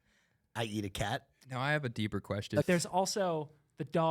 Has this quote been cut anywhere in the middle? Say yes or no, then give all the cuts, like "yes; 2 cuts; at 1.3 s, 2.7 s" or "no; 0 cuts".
yes; 2 cuts; at 1.4 s, 2.6 s